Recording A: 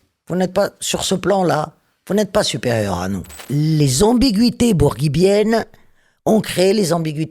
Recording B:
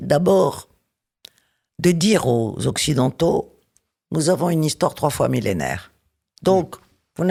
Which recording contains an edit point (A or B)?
A